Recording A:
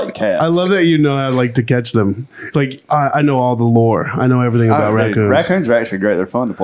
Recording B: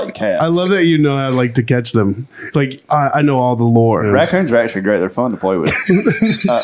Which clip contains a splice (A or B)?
B